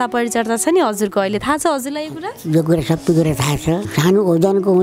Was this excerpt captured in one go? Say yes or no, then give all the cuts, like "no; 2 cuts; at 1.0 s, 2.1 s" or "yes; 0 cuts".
no; 1 cut; at 3.9 s